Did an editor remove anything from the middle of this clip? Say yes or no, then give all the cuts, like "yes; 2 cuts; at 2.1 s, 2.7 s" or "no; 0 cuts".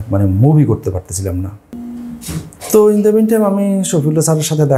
yes; 1 cut; at 1.6 s